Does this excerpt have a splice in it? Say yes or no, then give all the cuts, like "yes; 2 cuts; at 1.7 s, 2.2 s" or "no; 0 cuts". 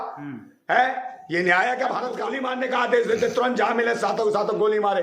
yes; 1 cut; at 2.3 s